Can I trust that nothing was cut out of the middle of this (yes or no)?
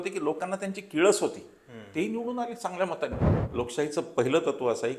no